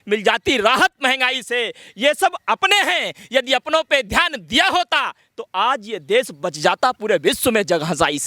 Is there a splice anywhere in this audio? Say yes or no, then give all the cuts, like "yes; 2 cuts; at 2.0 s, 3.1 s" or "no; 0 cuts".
no; 0 cuts